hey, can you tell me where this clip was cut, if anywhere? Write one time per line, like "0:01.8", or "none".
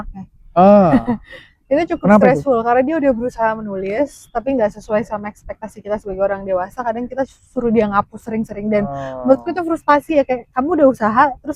none